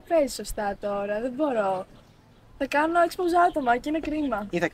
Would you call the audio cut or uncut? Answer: uncut